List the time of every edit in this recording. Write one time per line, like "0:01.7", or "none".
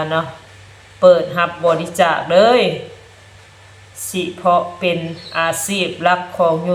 none